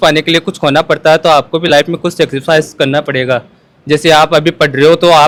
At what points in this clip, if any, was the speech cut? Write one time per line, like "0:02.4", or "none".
none